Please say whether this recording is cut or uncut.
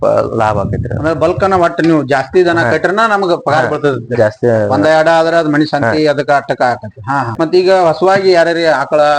cut